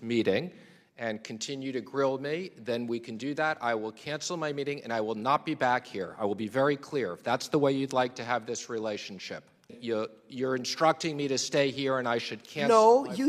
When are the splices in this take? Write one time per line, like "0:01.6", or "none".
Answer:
0:09.7